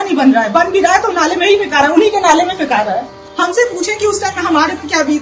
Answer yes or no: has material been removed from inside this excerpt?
yes